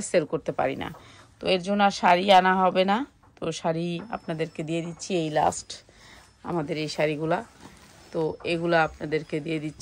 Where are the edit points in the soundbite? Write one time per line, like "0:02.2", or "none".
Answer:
none